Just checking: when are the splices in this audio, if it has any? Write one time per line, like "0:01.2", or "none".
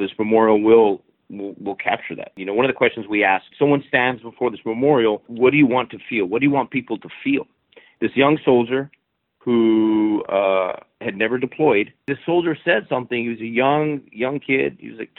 0:02.4
0:03.5
0:05.3
0:07.8
0:12.2